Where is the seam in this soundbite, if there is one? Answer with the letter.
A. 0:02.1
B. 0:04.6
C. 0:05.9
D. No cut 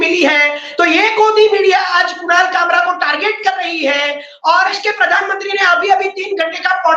B